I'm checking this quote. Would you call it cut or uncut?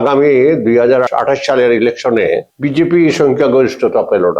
cut